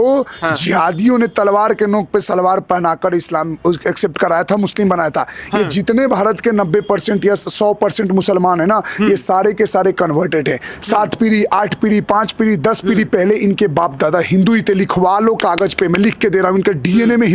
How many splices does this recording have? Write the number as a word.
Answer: zero